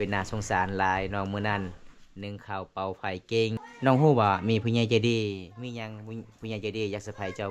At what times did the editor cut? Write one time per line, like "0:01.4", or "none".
0:03.7